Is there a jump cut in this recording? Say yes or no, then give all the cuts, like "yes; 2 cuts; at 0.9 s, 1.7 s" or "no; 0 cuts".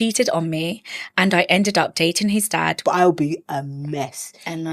yes; 1 cut; at 2.8 s